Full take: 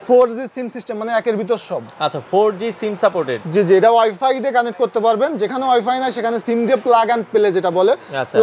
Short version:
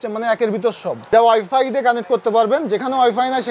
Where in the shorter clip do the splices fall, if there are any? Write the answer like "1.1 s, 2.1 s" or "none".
1.1 s